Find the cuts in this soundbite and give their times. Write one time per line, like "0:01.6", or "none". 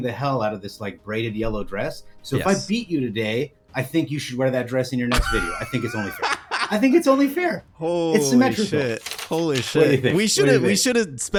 none